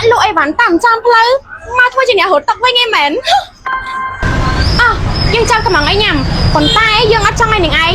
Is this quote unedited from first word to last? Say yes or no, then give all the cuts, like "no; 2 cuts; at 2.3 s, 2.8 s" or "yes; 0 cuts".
no; 1 cut; at 4.3 s